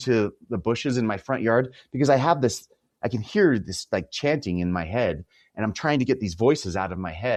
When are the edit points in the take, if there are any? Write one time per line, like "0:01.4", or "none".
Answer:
none